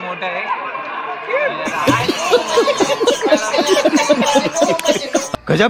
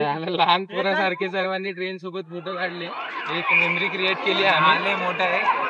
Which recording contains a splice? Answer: first; 1 cut; at 1.9 s

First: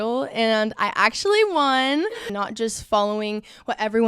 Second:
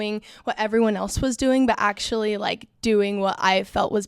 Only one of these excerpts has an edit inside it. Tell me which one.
first; 1 cut; at 2.3 s

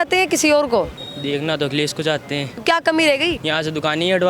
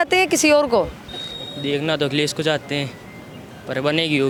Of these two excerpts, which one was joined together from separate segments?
first; 3 cuts; at 1.1 s, 2.6 s, 3.4 s

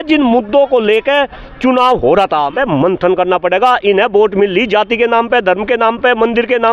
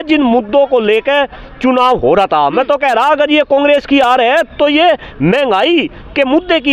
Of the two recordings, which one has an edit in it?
first; 1 cut; at 2.5 s

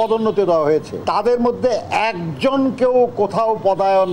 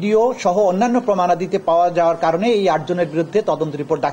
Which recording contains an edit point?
first; 1 cut; at 0.9 s

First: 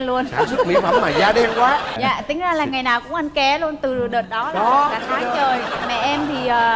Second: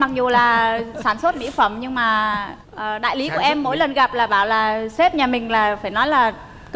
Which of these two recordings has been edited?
first; 1 cut; at 2.0 s

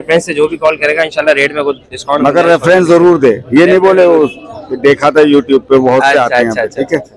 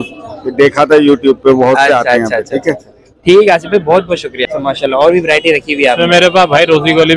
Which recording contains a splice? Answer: second; 1 cut; at 4.3 s

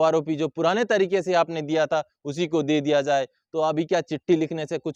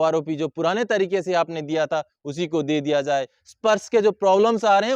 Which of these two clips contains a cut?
second; 1 cut; at 3.4 s

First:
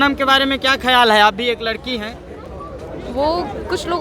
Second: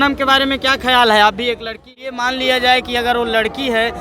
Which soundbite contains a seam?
second; 1 cut; at 2.2 s

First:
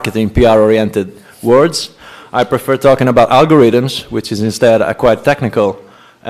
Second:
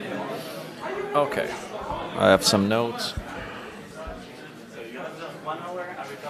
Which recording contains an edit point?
first; 1 cut; at 3.5 s

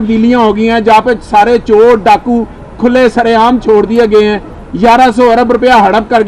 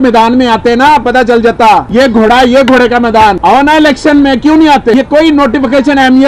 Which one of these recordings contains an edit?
second; 3 cuts; at 1.9 s, 3.4 s, 4.9 s

